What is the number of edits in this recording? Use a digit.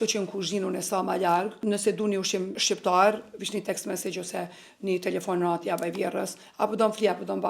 2